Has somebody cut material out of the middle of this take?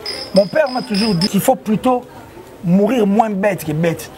yes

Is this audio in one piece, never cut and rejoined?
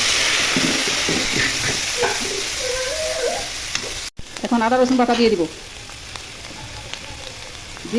yes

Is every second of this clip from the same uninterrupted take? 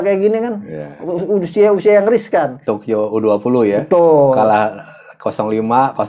no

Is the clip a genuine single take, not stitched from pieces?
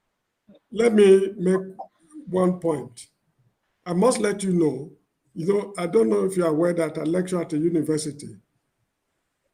yes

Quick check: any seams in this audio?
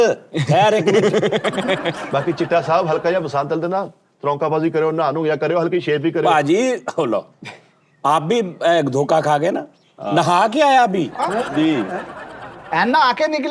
no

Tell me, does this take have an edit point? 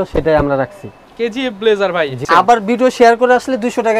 yes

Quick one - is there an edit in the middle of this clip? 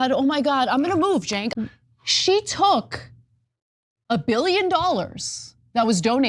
yes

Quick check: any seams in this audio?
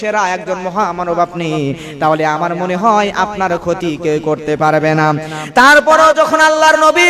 no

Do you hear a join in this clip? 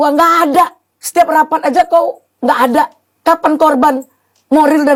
no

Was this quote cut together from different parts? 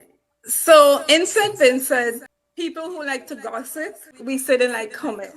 yes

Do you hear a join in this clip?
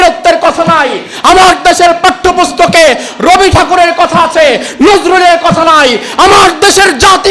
no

